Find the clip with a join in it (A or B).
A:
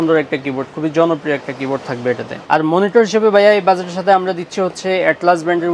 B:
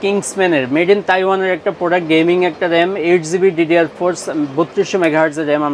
A